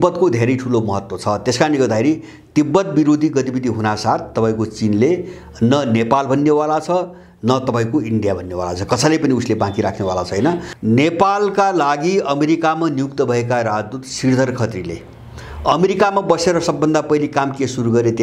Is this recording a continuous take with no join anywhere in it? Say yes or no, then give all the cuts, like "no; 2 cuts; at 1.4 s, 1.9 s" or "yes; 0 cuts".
no; 1 cut; at 10.7 s